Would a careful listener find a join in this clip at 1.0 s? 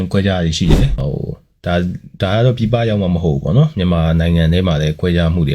yes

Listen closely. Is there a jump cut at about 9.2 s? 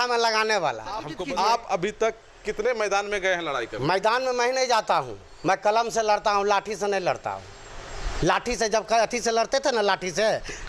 no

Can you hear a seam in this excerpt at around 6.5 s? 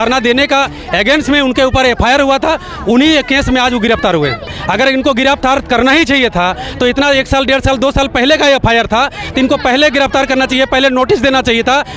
no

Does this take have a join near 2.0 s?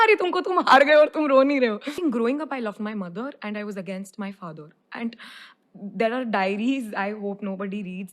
yes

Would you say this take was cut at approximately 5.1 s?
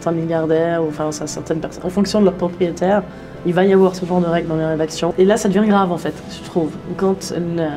yes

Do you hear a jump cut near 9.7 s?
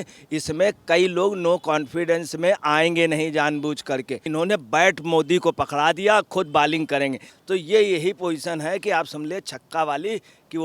no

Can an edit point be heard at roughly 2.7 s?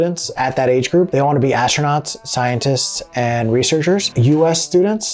no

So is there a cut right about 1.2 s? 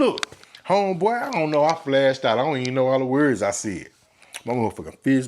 no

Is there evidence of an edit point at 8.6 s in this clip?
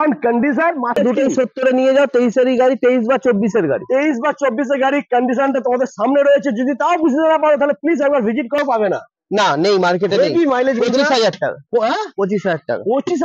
yes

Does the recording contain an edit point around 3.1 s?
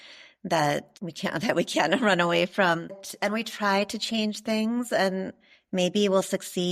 yes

